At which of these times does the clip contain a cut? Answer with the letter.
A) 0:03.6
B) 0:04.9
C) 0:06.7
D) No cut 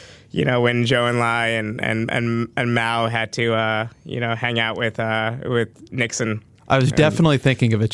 D